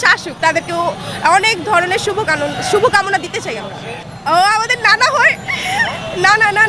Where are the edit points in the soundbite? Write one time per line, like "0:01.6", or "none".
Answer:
0:03.9